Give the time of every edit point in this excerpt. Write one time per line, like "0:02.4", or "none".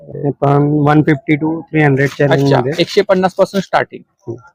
none